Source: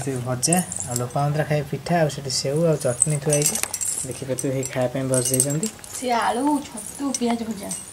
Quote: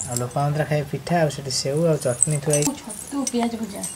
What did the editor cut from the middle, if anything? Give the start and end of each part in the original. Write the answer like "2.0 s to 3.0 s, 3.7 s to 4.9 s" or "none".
3.5 s to 6.5 s